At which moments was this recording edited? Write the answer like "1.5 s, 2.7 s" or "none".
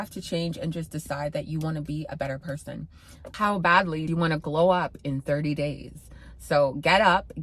3.3 s